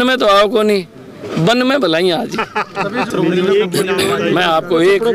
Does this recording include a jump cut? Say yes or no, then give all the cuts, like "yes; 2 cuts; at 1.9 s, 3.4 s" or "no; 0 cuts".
no; 0 cuts